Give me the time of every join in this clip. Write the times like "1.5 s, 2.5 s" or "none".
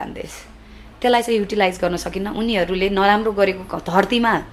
none